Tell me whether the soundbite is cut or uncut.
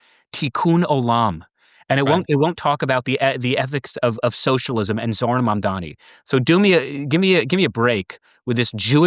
uncut